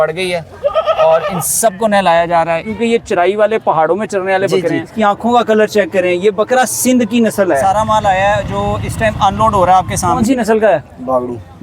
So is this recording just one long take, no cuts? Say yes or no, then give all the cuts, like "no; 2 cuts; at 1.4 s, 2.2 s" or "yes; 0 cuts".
no; 4 cuts; at 2.7 s, 4.9 s, 7.6 s, 10.2 s